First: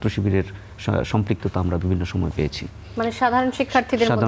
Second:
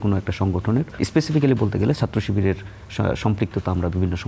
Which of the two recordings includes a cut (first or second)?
second